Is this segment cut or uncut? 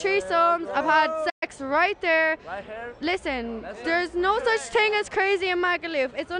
uncut